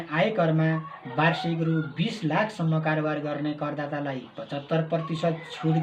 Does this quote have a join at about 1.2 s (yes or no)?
no